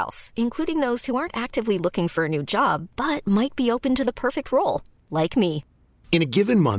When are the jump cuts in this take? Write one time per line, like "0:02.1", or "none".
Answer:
none